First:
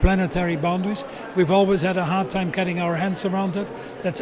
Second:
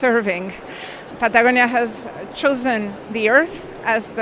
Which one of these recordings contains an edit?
second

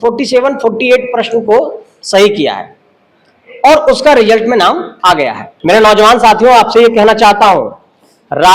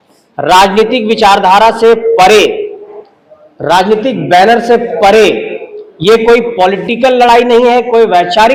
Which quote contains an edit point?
first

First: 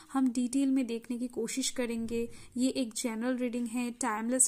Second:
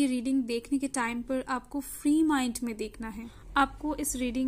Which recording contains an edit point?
second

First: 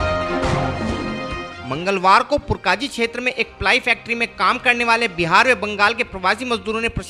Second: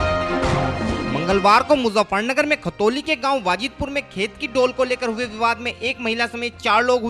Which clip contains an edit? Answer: first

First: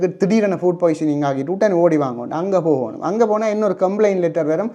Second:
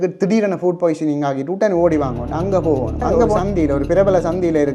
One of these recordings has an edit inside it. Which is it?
second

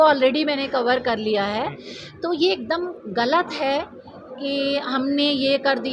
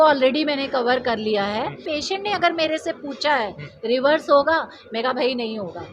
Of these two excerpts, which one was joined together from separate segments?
second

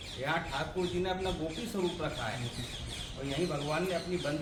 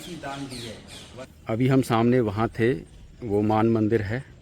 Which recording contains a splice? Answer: second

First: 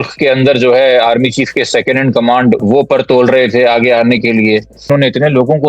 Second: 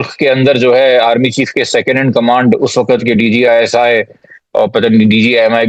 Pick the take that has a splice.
first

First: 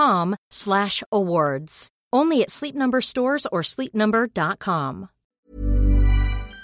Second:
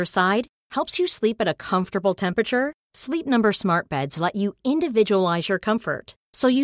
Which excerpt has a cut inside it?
first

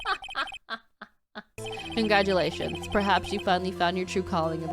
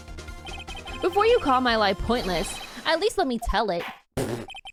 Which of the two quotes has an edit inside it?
first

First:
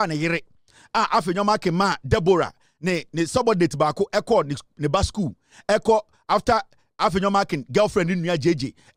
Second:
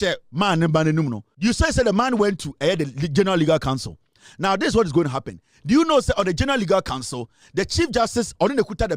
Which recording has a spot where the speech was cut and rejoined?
second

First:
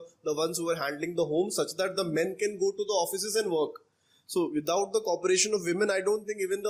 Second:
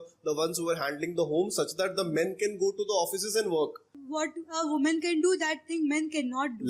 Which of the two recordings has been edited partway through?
second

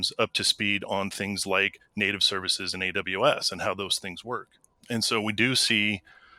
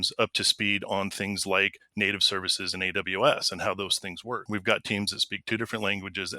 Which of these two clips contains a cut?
second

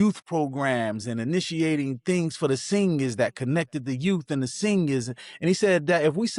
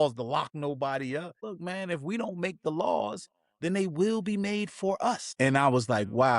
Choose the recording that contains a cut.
second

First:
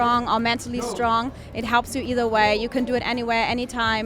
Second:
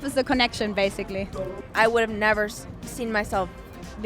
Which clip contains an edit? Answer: second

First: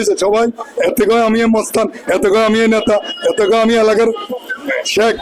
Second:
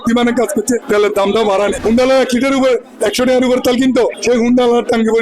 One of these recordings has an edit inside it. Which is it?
second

